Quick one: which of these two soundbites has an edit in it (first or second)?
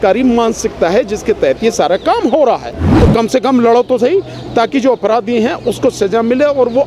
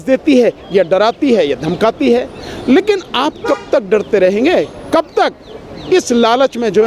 first